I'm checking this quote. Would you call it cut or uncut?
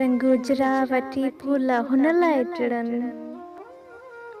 uncut